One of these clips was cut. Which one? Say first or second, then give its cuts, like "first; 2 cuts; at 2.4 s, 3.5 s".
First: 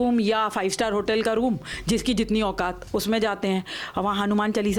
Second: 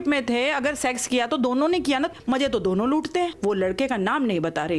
second; 2 cuts; at 2.1 s, 3.3 s